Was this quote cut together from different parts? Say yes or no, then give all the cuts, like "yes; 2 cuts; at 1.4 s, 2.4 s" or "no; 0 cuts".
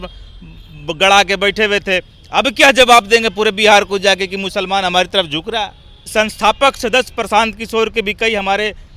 yes; 1 cut; at 6.1 s